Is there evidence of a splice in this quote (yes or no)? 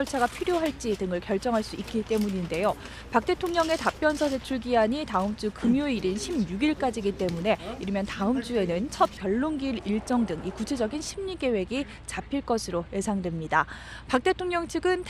no